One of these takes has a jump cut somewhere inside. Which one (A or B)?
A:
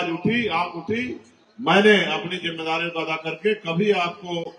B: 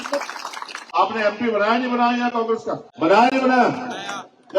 B